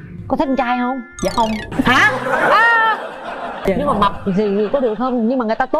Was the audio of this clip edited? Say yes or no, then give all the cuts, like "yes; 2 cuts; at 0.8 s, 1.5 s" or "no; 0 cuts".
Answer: yes; 2 cuts; at 1.6 s, 3.6 s